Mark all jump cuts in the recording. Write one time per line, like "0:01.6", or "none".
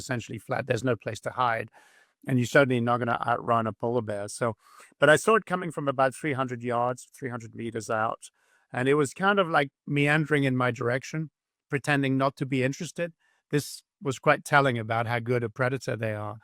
none